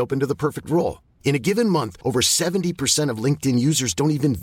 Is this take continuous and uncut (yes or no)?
yes